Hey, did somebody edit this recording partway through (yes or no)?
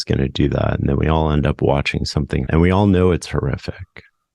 yes